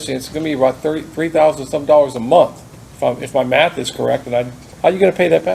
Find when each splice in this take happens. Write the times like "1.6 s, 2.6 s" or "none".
4.6 s